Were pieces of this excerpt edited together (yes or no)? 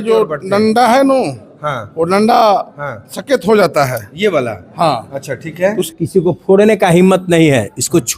yes